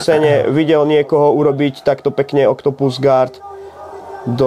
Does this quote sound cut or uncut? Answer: uncut